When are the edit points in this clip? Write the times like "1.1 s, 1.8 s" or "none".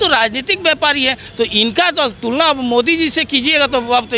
none